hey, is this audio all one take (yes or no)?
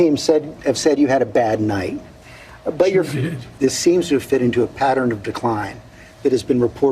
no